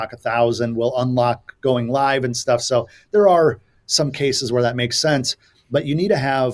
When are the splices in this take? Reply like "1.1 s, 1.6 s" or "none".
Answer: none